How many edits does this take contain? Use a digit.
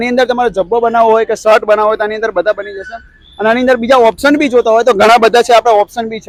0